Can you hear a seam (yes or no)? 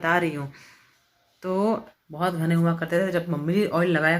yes